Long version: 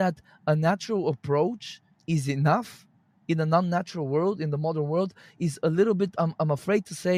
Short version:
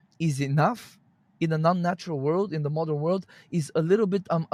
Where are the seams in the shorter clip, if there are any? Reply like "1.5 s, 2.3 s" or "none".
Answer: none